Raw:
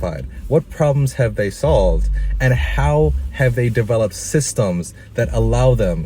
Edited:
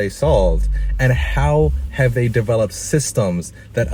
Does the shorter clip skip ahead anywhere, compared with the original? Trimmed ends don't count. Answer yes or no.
no